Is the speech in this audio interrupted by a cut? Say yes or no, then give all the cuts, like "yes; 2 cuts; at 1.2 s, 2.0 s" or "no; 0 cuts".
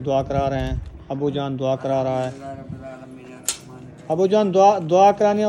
no; 0 cuts